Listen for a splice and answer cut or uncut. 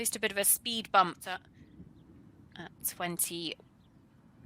cut